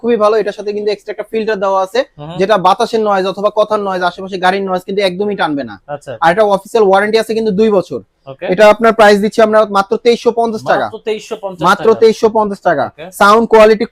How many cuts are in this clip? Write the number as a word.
zero